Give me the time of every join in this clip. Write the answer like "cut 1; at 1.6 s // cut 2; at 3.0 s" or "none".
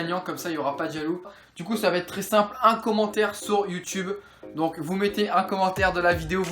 cut 1; at 1.4 s